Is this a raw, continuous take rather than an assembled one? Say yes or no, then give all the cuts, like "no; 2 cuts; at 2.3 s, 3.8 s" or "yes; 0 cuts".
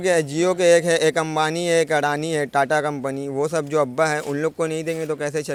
yes; 0 cuts